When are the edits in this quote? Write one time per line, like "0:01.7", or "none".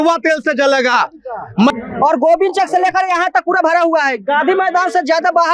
0:01.8